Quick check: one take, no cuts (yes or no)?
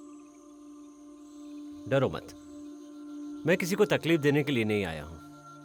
yes